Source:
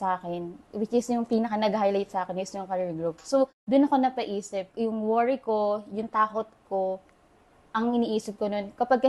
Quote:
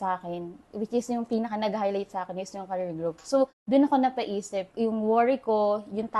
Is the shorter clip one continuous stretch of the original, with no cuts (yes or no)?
yes